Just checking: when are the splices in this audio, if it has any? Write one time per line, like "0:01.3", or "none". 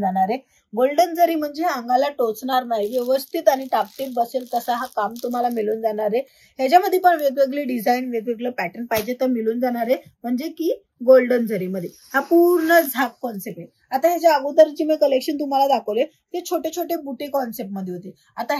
none